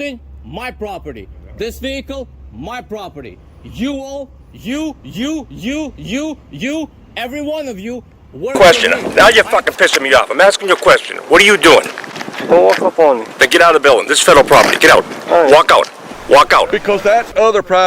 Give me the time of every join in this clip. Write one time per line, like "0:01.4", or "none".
0:08.6
0:16.7